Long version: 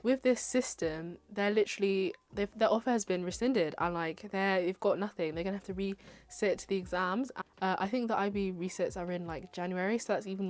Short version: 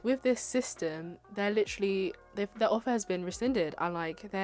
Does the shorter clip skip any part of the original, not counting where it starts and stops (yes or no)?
no